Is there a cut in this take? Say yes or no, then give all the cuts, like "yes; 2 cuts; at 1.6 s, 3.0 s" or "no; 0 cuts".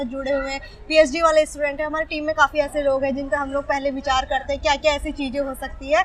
no; 0 cuts